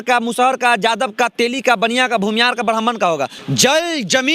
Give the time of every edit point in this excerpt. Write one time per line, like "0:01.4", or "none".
0:03.4

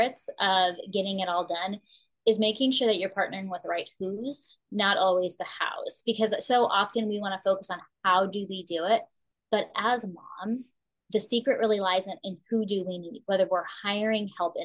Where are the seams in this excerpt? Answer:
none

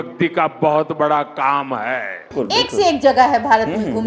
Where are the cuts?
0:02.3

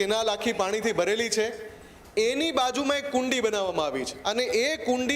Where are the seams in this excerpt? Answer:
0:04.1

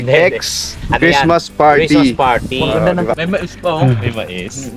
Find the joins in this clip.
0:03.1

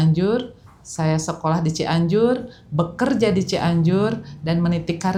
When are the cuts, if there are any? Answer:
none

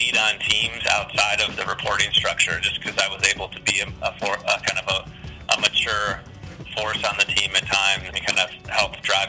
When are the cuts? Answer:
0:08.1

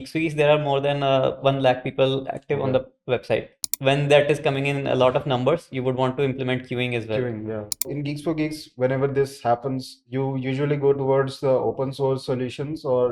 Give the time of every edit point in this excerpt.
0:03.6
0:07.9

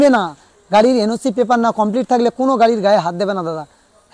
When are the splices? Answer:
none

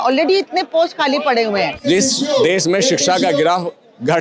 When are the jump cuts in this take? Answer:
0:01.8

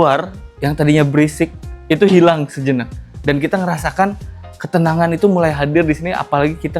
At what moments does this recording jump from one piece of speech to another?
none

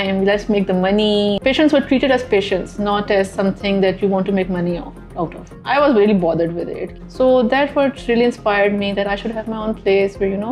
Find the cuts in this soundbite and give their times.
0:01.4
0:05.5
0:06.9

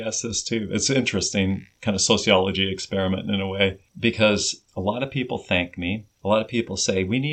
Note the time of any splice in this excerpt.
0:01.7
0:03.9
0:04.6
0:06.1

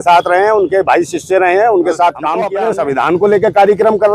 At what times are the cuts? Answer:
0:02.5

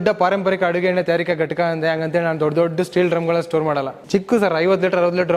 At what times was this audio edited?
0:04.0

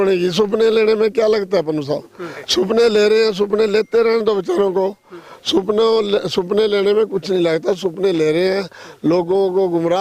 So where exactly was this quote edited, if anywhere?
none

